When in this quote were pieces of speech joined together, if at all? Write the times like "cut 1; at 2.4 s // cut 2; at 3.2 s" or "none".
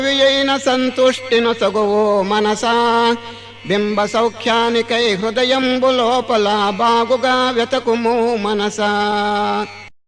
none

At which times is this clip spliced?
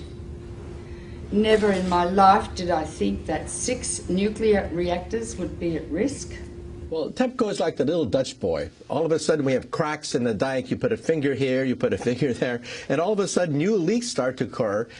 cut 1; at 8.5 s

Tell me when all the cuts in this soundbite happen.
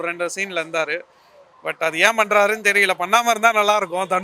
none

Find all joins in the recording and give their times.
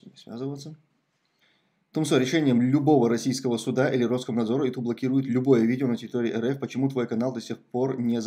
none

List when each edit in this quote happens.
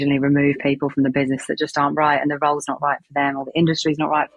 none

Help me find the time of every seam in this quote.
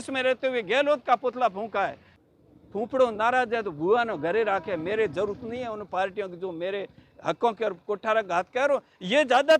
cut 1; at 2.1 s

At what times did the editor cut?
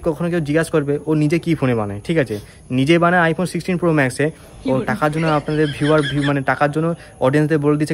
none

